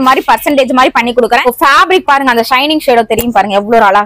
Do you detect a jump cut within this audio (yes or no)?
no